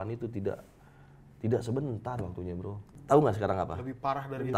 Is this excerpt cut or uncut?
cut